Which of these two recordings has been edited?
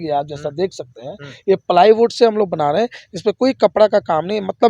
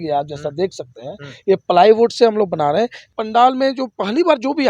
second; 1 cut; at 3.1 s

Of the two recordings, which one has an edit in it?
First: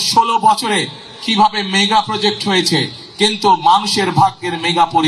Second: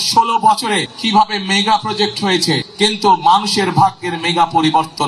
second; 2 cuts; at 0.9 s, 2.7 s

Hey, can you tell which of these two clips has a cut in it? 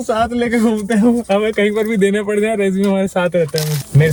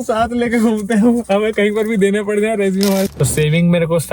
second; 1 cut; at 3.1 s

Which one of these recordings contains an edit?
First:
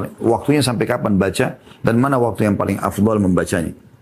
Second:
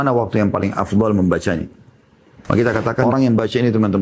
second; 1 cut; at 3.1 s

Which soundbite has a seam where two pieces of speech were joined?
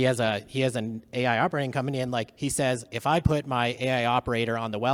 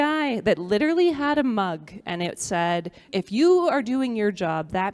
second; 1 cut; at 3.0 s

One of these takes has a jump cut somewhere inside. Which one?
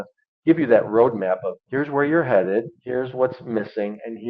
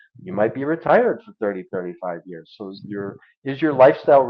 first; 2 cuts; at 1.6 s, 2.8 s

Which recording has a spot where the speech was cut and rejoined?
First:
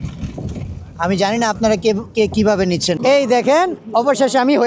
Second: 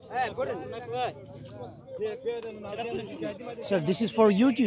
first; 1 cut; at 3.0 s

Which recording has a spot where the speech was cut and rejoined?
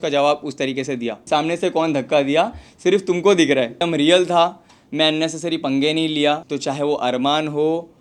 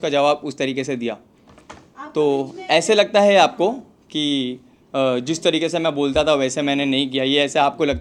first; 3 cuts; at 1.2 s, 3.8 s, 6.5 s

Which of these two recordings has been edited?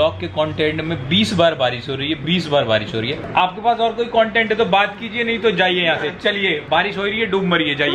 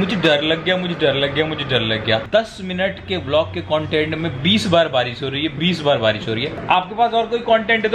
second; 1 cut; at 2.2 s

